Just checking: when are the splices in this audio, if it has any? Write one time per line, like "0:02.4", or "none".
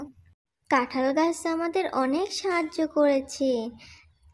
none